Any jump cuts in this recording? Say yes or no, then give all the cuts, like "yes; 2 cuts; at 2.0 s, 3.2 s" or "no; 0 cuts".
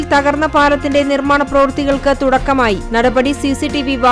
no; 0 cuts